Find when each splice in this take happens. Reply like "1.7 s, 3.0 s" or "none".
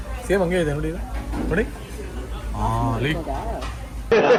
none